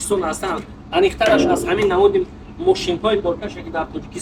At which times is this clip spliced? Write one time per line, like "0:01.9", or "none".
none

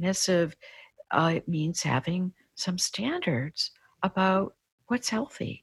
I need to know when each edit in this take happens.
none

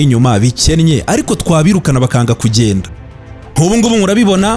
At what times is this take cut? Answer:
0:03.0

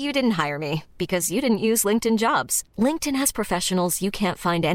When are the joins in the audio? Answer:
none

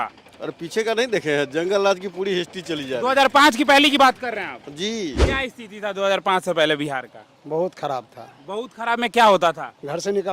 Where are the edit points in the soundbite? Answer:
0:05.2

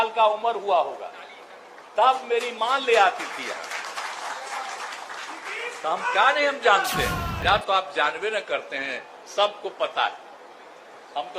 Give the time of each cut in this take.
0:07.3

